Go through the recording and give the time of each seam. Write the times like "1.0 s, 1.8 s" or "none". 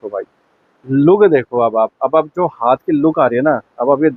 none